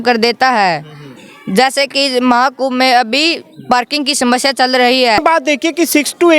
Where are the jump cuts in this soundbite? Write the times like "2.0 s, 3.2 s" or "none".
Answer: 5.2 s